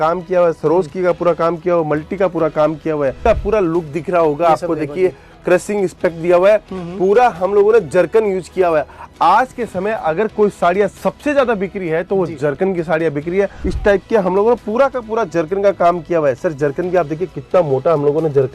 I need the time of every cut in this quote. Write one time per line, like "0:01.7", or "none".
0:03.2
0:13.6